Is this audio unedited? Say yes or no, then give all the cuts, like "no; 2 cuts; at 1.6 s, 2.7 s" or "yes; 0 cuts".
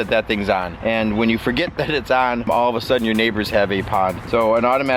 no; 1 cut; at 2.5 s